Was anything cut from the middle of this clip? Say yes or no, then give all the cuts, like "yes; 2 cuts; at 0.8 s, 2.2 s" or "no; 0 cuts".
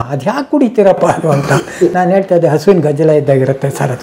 no; 0 cuts